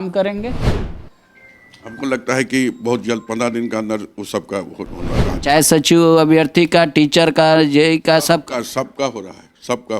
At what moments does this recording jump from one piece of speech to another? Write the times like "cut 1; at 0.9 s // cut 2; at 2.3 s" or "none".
cut 1; at 5.2 s